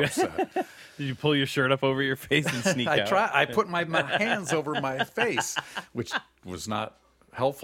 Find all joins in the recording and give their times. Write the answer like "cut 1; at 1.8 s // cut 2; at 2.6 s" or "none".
cut 1; at 2.5 s